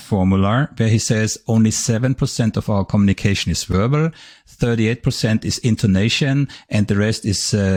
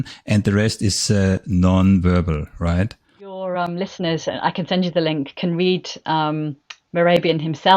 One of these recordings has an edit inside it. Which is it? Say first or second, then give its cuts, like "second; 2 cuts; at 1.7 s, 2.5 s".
second; 1 cut; at 3.4 s